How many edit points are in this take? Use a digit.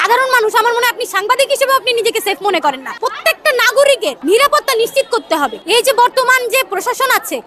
0